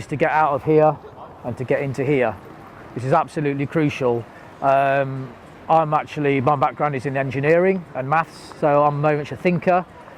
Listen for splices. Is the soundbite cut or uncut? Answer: uncut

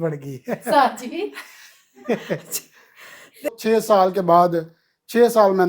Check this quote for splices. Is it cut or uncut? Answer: cut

